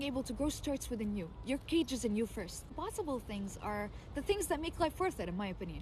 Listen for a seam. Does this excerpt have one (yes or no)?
yes